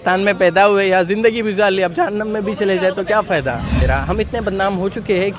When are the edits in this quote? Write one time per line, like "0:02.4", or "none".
0:03.8